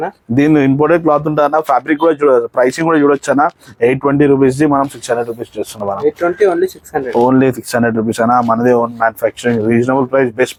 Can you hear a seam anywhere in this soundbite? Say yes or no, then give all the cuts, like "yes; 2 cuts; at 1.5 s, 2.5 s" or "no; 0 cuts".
no; 0 cuts